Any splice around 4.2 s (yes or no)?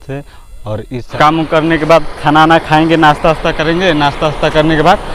no